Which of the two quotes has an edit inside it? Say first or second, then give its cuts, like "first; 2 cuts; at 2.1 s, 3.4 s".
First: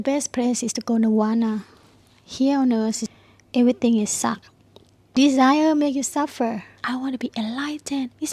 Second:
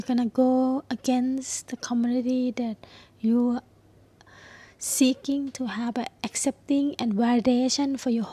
first; 3 cuts; at 3.1 s, 5.2 s, 6.8 s